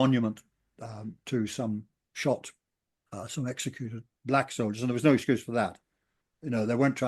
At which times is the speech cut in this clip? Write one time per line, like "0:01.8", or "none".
0:04.1